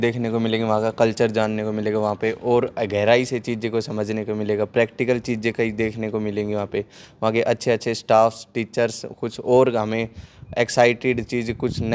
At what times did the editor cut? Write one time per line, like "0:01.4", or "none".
none